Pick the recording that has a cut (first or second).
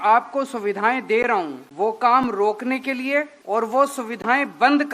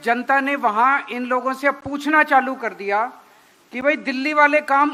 first